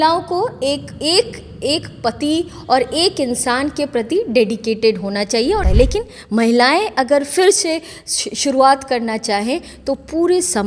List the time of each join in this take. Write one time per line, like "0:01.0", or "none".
0:05.6